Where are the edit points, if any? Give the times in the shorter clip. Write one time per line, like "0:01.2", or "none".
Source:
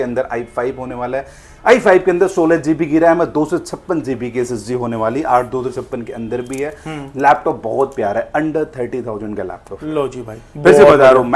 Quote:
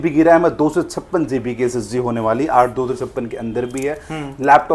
none